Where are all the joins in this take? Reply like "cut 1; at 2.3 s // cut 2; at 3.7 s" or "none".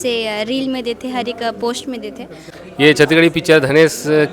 cut 1; at 2.4 s